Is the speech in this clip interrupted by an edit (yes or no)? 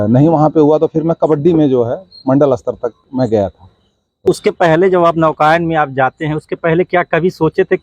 yes